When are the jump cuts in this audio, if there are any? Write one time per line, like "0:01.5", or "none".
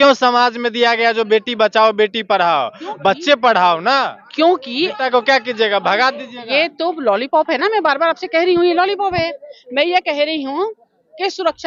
none

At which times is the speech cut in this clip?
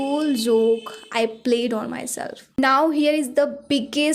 0:02.4

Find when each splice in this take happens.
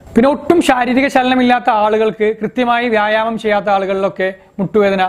none

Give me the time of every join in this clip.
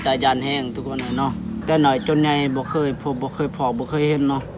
0:01.6

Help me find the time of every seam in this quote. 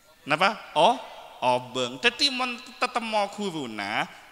none

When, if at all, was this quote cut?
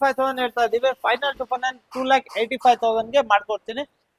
none

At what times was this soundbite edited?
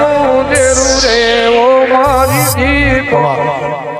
none

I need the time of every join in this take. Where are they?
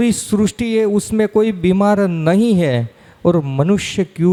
none

